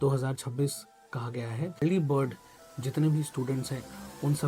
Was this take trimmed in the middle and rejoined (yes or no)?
yes